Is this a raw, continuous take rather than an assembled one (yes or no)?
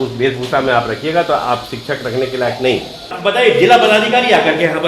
no